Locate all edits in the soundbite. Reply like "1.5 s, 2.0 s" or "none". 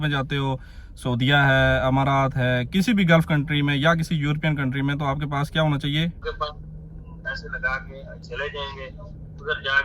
6.2 s